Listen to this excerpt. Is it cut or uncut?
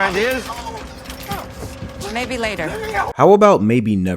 cut